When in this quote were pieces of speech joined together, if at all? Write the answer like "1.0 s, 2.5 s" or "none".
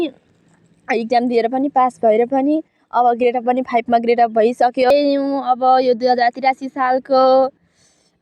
4.9 s